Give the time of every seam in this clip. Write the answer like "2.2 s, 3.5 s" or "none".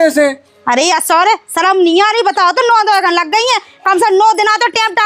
none